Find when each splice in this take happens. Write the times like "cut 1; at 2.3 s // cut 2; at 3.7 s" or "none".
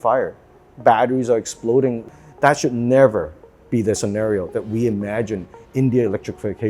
cut 1; at 2.0 s